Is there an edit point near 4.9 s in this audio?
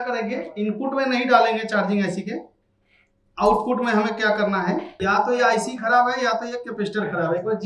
yes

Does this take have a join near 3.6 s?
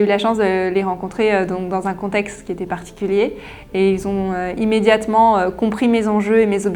no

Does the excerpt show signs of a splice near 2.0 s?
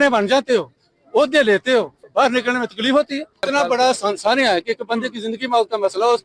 yes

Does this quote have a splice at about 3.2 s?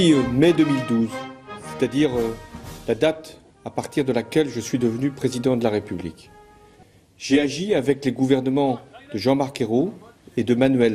no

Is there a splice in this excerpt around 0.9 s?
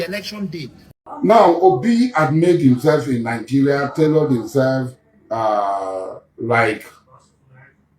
yes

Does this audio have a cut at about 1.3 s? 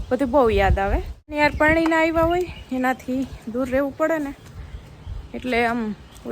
yes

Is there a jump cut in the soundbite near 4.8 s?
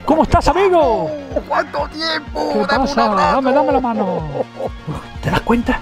yes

